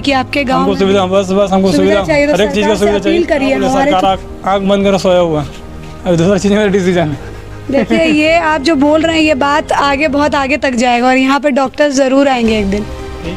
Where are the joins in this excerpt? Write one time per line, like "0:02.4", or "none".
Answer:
0:03.9